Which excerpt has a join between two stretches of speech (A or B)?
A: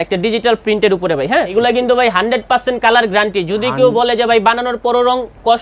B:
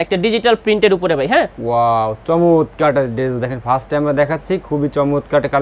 A